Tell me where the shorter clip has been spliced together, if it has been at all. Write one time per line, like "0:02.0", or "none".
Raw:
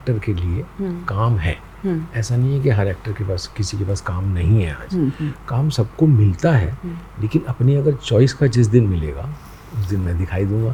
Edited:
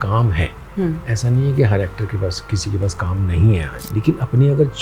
0:03.7